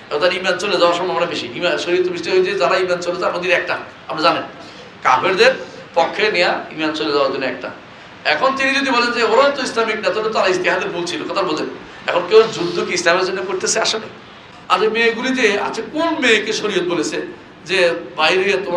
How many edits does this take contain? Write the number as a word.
one